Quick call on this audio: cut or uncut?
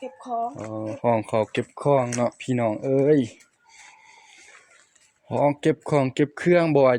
uncut